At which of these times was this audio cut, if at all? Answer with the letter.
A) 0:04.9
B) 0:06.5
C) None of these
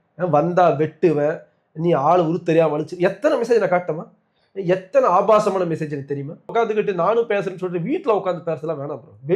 B